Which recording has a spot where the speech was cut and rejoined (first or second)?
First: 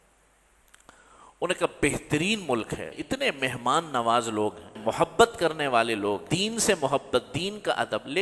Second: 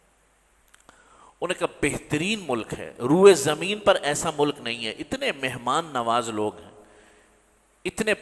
first